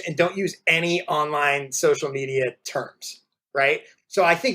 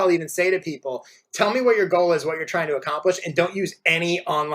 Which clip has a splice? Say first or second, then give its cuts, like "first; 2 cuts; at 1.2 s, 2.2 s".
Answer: first; 1 cut; at 3.6 s